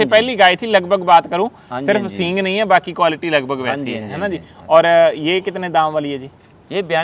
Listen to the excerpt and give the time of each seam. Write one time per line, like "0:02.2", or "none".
none